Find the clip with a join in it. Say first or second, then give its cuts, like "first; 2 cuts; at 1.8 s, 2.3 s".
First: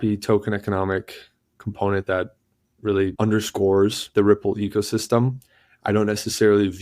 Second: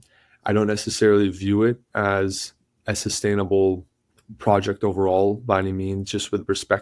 first; 2 cuts; at 3.1 s, 4.0 s